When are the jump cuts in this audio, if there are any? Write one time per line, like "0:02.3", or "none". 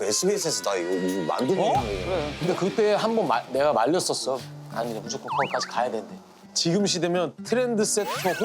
0:02.3
0:04.5